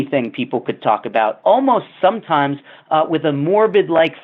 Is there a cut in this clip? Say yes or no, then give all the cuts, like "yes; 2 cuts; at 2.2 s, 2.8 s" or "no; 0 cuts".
yes; 1 cut; at 1.4 s